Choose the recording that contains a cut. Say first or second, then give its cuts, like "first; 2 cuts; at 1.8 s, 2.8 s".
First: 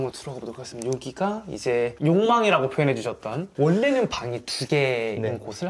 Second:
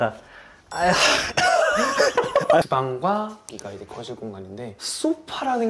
second; 1 cut; at 2.6 s